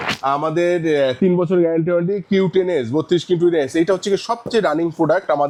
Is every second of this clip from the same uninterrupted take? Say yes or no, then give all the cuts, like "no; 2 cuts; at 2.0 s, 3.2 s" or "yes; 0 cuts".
yes; 0 cuts